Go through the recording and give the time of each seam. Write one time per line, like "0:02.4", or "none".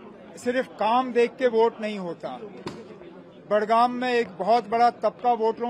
none

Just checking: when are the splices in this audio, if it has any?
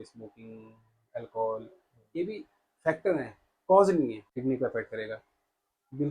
0:04.2

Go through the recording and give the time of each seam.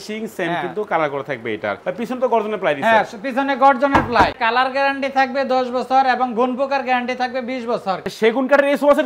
0:01.8
0:04.3
0:08.1

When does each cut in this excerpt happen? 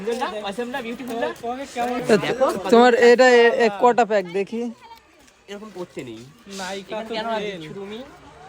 none

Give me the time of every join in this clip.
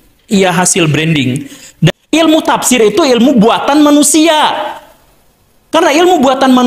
0:01.9

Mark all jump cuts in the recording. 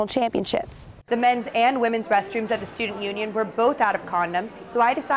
0:00.9

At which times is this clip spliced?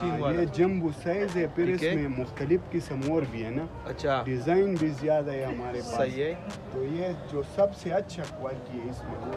none

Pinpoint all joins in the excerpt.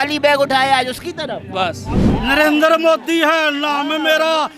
0:02.1

